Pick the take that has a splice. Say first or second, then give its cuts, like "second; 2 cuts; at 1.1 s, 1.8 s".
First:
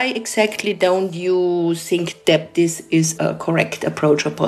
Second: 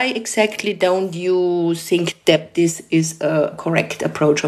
first; 1 cut; at 3.3 s